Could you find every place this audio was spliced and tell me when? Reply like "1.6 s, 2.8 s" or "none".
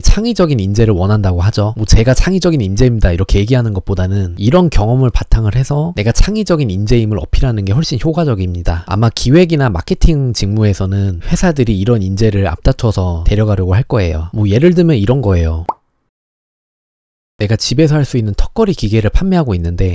none